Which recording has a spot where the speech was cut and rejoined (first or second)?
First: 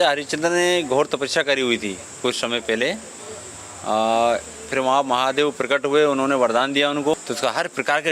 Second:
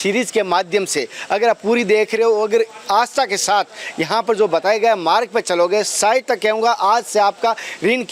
first